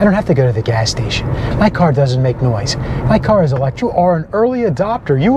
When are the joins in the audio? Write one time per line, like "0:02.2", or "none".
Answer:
0:03.8

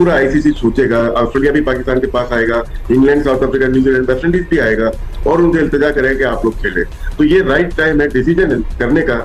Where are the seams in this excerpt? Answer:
none

